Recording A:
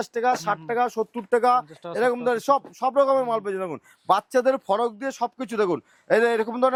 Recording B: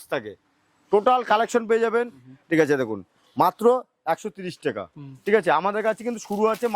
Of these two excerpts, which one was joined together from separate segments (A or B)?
B